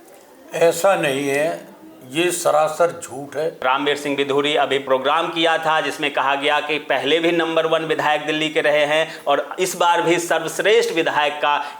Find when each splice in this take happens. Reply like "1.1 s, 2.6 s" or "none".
3.6 s, 4.8 s